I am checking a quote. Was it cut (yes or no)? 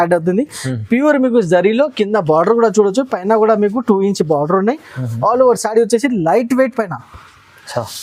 no